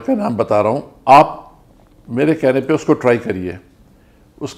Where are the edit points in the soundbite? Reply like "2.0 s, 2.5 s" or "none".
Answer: 0.9 s

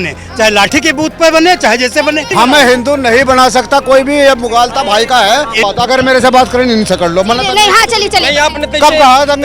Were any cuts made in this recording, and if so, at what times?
2.3 s, 5.6 s

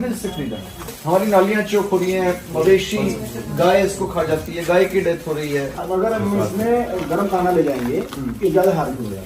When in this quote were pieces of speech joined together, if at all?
0.9 s, 5.8 s

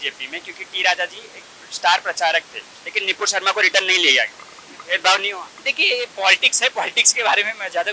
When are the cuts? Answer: none

